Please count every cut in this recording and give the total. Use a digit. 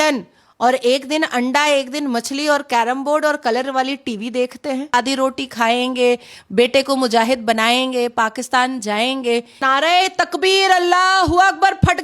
2